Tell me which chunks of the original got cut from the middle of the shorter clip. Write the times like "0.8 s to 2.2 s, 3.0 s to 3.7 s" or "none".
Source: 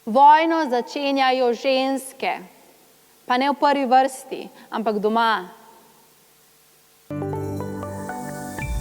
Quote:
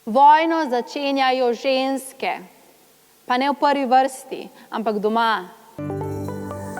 5.6 s to 6.9 s